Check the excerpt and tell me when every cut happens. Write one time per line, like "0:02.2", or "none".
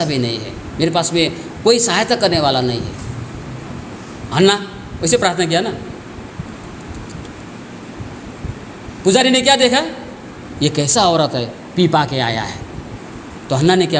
0:03.7
0:12.9